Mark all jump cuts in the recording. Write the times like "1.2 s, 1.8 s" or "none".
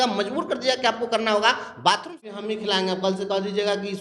2.4 s